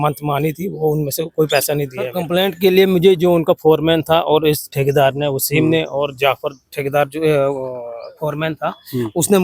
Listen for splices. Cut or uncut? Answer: cut